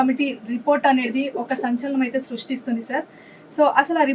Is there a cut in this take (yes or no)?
no